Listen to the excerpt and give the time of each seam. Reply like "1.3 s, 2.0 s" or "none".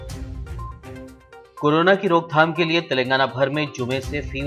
1.0 s